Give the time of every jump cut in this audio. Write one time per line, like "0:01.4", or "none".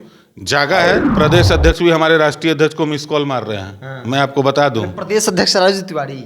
0:01.1